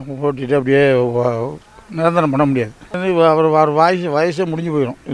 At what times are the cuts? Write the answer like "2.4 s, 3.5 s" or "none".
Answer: 3.0 s